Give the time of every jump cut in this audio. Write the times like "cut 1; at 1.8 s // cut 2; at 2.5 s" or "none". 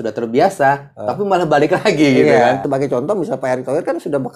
cut 1; at 2.6 s